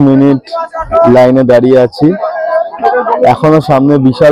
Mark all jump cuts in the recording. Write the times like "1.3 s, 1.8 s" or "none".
none

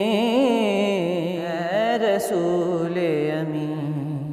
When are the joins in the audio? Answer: 1.5 s

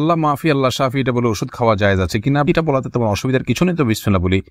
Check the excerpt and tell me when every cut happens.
none

